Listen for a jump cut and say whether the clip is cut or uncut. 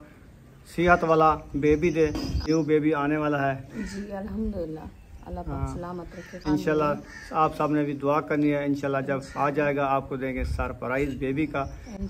cut